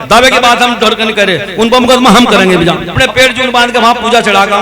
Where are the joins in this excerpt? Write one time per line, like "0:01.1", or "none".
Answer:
0:03.0